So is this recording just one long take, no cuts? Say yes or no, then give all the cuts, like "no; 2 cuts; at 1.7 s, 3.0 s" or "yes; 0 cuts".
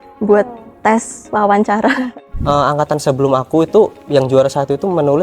no; 1 cut; at 2.2 s